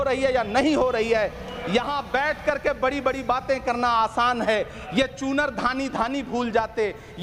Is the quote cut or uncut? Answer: uncut